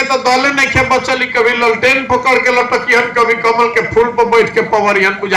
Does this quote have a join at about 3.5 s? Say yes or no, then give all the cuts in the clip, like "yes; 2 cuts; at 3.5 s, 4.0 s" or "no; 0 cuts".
no; 0 cuts